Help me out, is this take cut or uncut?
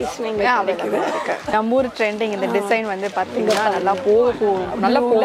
cut